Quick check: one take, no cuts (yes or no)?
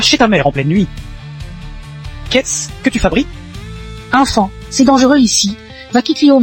yes